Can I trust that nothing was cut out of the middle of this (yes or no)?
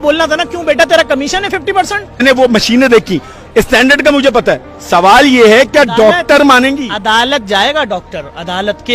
no